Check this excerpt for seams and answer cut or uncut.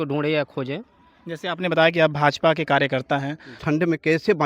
cut